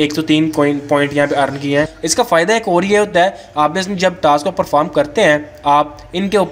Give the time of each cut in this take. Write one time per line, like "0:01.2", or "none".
0:02.0